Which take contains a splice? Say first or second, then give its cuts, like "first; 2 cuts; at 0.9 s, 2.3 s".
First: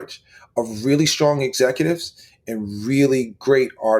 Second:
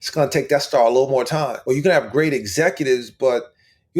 second; 1 cut; at 1.5 s